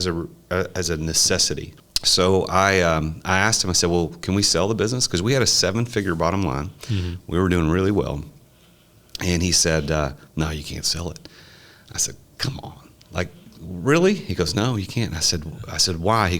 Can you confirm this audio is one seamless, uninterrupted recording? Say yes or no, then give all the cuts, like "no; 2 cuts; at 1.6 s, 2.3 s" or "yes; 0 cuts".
no; 1 cut; at 1.8 s